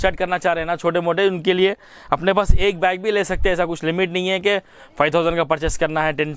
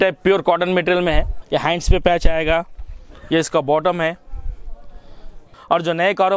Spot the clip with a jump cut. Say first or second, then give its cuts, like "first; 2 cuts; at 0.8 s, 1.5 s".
second; 2 cuts; at 1.4 s, 5.5 s